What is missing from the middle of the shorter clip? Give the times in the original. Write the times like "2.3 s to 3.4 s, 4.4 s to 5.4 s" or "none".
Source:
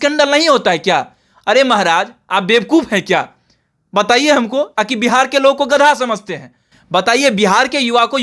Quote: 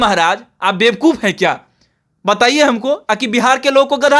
none